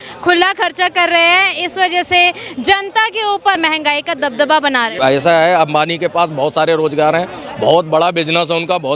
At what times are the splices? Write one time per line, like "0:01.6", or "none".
0:03.6
0:04.9